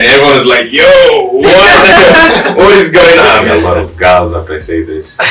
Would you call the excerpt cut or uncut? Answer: cut